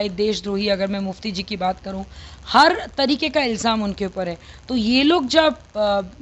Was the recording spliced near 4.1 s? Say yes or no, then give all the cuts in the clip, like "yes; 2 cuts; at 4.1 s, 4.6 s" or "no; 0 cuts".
no; 0 cuts